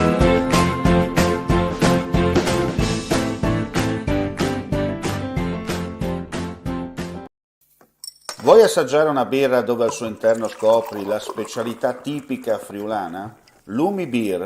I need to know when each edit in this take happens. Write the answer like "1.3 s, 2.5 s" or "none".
7.3 s